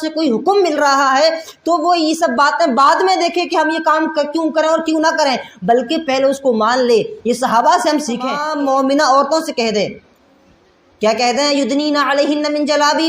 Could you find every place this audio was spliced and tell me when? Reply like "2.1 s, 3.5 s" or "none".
8.4 s